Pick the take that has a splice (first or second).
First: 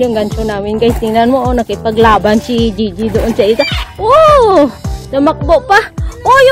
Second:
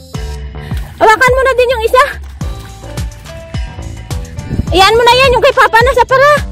second